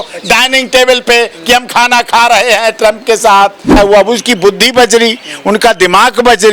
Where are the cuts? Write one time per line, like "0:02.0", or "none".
0:03.8